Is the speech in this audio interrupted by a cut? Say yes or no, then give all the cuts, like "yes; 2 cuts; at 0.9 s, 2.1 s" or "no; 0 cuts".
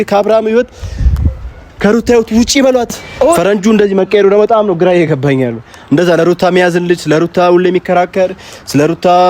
yes; 1 cut; at 3.4 s